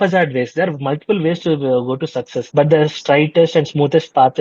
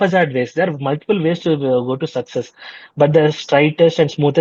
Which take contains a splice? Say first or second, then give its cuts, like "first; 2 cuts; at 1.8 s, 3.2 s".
first; 1 cut; at 2.4 s